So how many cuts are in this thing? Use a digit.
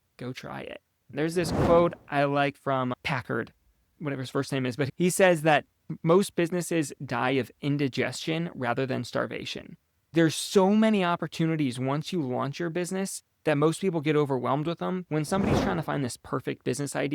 3